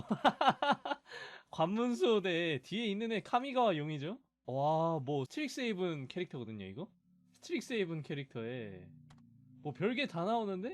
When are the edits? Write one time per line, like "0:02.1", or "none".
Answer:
none